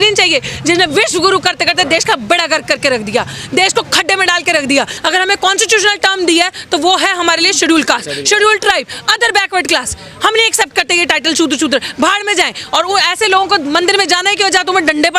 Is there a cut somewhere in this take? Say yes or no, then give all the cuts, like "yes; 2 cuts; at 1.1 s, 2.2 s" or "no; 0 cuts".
yes; 1 cut; at 5.0 s